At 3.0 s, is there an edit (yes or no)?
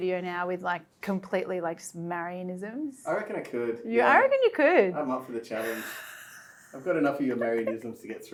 no